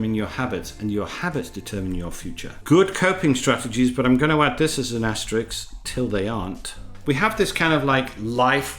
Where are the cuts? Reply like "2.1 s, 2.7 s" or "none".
2.6 s, 6.9 s